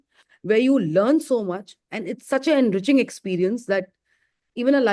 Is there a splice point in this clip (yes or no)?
no